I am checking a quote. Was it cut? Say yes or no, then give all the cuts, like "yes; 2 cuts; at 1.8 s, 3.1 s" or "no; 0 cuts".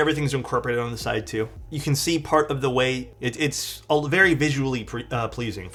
no; 0 cuts